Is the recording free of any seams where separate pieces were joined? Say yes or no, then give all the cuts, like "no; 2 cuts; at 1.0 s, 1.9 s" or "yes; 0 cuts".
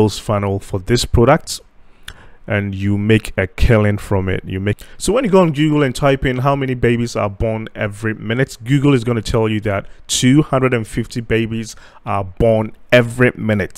no; 1 cut; at 4.8 s